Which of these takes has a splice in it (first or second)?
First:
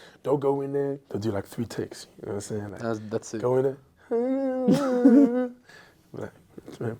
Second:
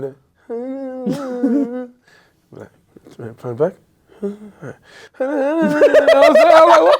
first